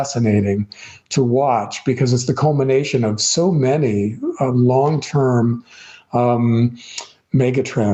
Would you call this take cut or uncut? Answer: uncut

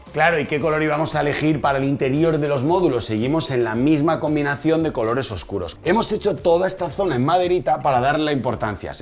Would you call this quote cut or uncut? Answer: cut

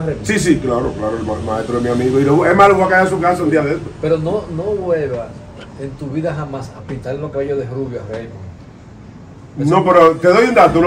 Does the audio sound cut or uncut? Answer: uncut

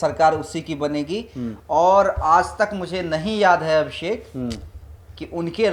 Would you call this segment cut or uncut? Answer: uncut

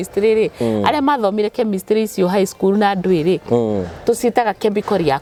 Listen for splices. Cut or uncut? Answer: uncut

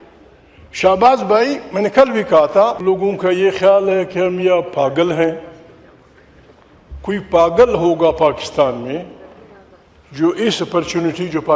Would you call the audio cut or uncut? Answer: cut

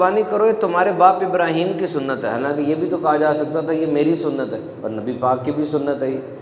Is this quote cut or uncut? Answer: uncut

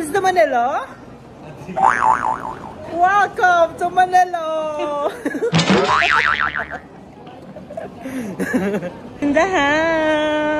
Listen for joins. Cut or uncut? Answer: cut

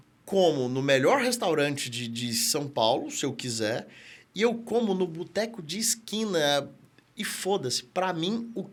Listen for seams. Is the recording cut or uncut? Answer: uncut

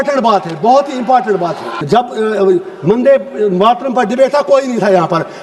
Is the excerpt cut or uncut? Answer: cut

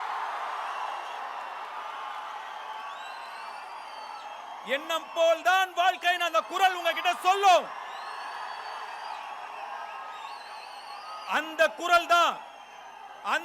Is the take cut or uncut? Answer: uncut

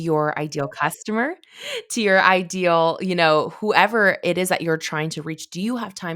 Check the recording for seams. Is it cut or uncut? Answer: uncut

